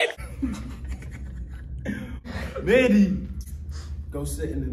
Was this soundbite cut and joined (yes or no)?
yes